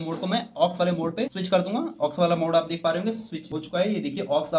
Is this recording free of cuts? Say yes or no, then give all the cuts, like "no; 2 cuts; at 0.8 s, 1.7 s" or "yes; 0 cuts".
yes; 0 cuts